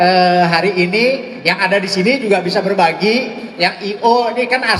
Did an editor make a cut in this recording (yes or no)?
no